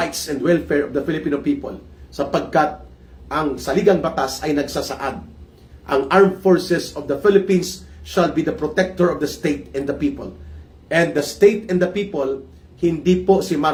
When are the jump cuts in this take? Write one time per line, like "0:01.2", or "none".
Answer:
none